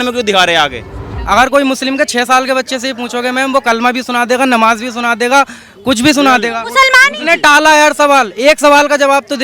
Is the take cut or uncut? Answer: cut